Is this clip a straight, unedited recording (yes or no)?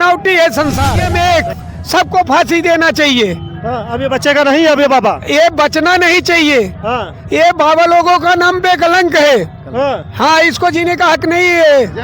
no